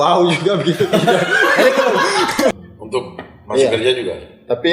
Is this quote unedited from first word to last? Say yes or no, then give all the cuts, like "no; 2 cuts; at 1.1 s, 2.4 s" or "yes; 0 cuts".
no; 1 cut; at 2.5 s